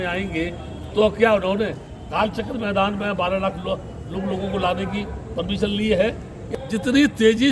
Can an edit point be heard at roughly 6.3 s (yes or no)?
yes